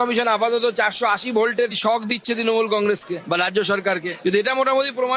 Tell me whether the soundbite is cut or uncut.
uncut